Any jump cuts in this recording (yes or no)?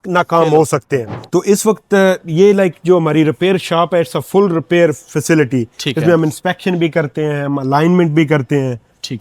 yes